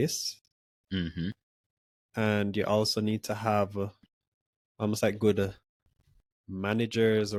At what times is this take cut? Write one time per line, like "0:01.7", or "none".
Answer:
none